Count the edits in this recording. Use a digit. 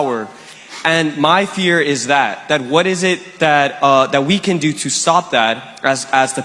0